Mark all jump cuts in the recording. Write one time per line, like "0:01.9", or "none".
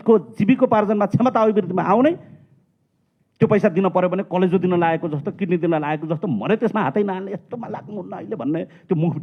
none